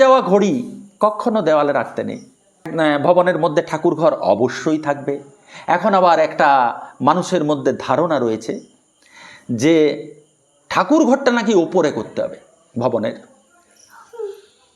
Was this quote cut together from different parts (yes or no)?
yes